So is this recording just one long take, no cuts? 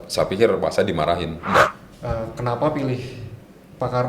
no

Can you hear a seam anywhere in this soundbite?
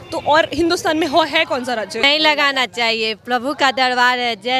yes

